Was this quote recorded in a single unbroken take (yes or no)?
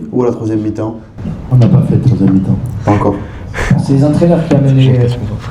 yes